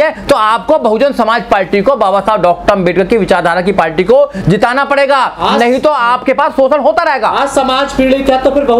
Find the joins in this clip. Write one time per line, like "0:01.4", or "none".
none